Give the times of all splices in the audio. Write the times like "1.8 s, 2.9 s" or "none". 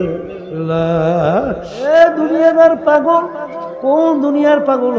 1.6 s